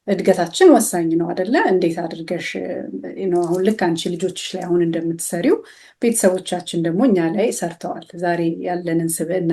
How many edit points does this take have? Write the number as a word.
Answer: zero